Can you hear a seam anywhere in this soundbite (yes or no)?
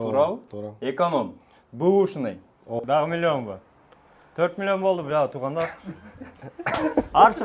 yes